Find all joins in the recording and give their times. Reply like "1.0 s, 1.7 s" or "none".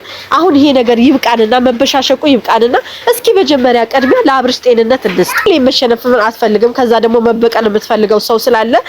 5.4 s